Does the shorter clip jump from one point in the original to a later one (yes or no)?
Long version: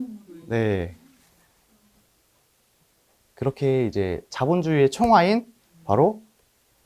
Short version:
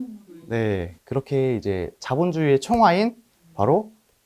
yes